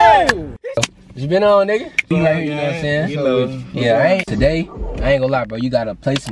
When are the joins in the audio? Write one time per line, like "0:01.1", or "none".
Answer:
0:00.9
0:02.1
0:04.3